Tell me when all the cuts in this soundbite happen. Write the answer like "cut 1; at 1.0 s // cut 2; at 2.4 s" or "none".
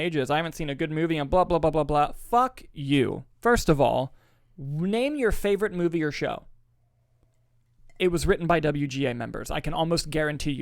none